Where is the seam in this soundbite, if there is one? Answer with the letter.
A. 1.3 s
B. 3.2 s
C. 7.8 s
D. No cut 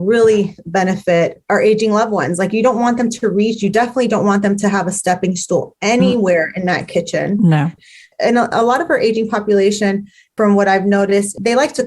C